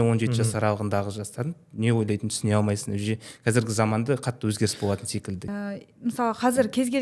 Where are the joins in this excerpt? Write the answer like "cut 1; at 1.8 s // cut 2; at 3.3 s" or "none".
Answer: cut 1; at 5.4 s